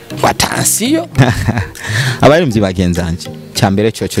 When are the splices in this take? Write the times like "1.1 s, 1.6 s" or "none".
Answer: 1.1 s